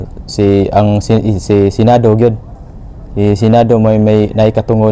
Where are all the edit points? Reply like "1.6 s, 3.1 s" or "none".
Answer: none

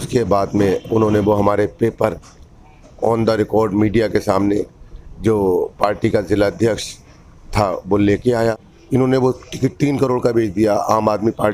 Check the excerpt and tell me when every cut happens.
8.7 s

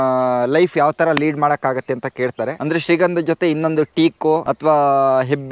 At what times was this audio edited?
2.6 s, 4.5 s

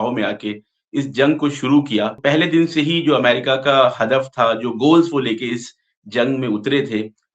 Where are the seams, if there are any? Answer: 2.2 s

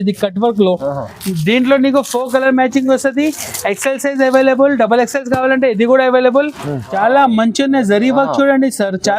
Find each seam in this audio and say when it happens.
6.8 s

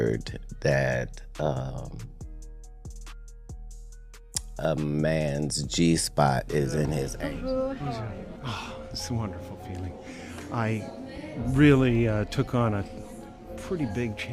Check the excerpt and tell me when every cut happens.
7.1 s

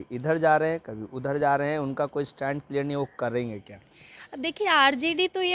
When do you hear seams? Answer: none

